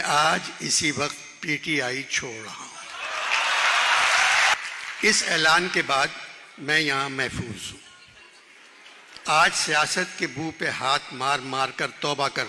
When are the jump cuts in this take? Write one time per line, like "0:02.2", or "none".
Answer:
0:04.5